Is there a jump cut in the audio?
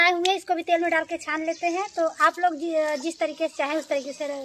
no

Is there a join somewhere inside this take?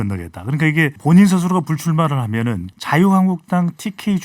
yes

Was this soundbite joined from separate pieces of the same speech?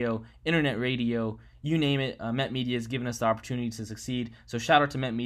no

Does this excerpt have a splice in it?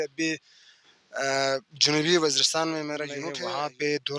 yes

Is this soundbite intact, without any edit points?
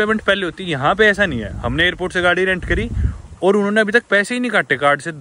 yes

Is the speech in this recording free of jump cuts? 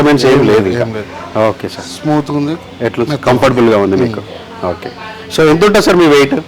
yes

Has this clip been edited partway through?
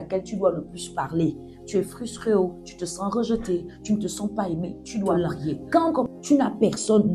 yes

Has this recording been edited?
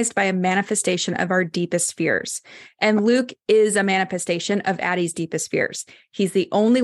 no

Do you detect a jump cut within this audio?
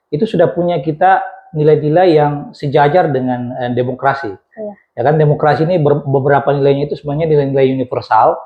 no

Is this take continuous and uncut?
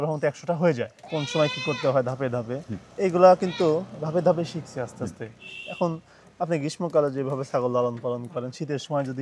no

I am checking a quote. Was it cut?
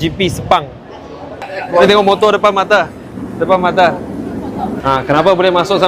yes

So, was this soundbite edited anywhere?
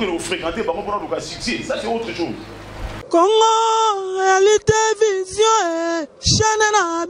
yes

